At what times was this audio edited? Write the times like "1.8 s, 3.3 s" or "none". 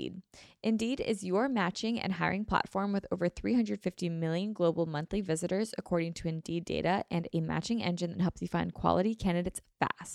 none

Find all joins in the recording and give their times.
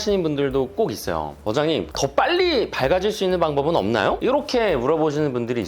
1.9 s

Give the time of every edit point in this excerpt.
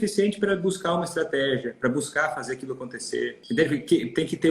3.4 s

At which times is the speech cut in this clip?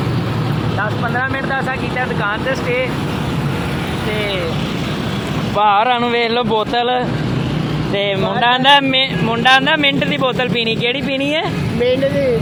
none

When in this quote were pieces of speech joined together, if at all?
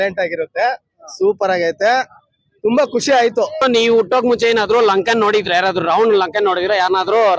3.6 s

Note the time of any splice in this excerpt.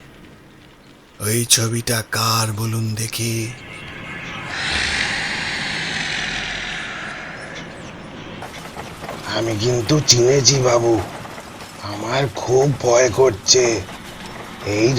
8.4 s

